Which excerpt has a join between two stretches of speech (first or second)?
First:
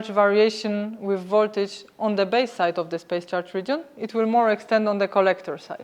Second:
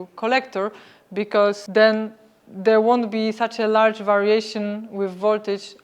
second